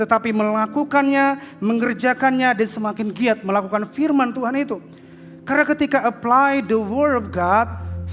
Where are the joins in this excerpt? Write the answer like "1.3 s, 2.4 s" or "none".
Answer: none